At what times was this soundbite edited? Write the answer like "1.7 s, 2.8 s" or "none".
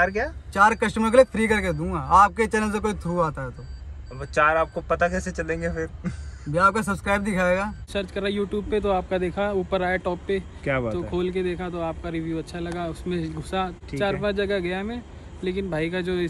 7.8 s, 13.8 s